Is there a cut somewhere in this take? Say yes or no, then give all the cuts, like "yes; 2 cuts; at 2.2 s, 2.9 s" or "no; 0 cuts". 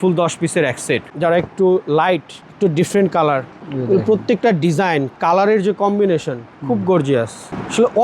yes; 2 cuts; at 1.1 s, 3.5 s